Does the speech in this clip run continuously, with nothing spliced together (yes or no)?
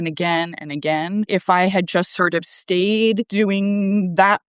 no